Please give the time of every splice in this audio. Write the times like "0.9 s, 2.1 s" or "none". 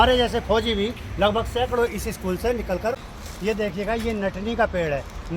3.3 s